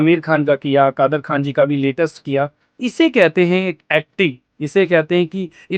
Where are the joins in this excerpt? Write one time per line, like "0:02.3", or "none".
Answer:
none